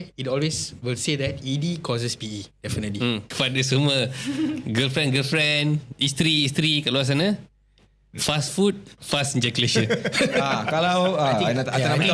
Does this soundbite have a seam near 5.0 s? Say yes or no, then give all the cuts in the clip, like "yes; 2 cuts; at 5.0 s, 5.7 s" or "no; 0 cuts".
no; 1 cut; at 3.3 s